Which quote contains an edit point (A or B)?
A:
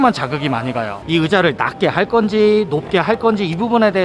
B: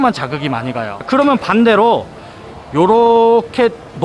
A